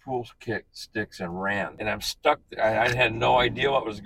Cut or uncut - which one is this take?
cut